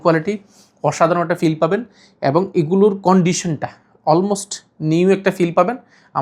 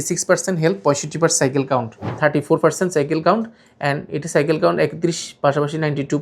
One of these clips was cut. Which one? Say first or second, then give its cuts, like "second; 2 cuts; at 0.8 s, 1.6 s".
second; 1 cut; at 2.1 s